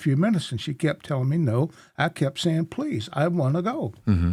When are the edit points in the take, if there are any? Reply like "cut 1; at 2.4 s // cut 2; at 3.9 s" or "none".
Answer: none

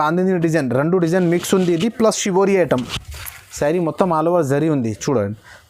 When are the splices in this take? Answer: none

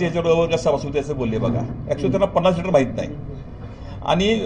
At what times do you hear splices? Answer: none

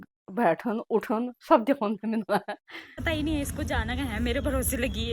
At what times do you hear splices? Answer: cut 1; at 3.0 s

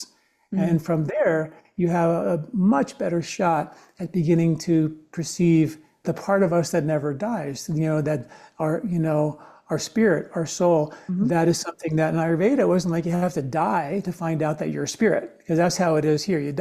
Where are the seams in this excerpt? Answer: cut 1; at 6.0 s

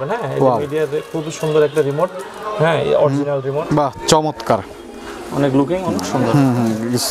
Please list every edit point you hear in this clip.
cut 1; at 3.7 s

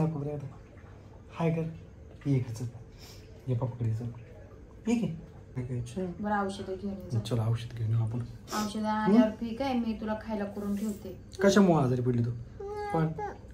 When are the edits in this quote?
cut 1; at 5.6 s

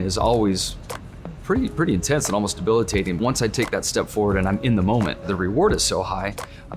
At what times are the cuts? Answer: cut 1; at 3.2 s // cut 2; at 5.3 s

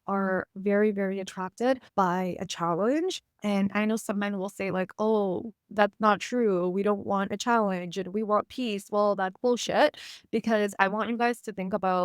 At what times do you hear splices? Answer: cut 1; at 1.9 s // cut 2; at 3.3 s

